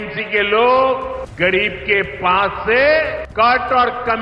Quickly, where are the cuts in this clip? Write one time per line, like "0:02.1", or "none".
0:01.2
0:03.2